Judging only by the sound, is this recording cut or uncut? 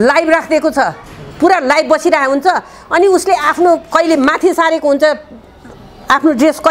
uncut